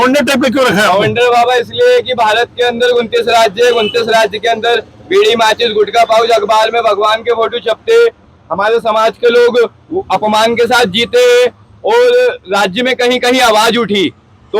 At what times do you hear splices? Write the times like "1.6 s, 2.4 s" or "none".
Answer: none